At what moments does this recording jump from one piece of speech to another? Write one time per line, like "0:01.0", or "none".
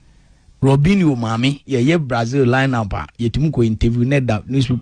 none